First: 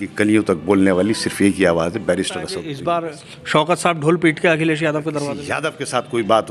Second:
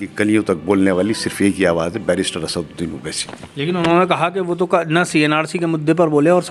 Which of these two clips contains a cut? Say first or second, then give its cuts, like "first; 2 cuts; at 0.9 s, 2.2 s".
first; 2 cuts; at 2.6 s, 5.4 s